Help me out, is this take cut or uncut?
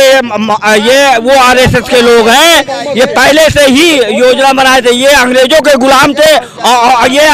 uncut